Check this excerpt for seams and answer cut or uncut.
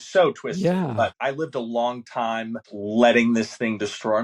cut